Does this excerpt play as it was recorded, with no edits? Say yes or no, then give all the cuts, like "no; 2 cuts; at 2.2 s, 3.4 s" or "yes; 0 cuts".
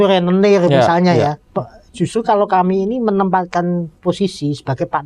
yes; 0 cuts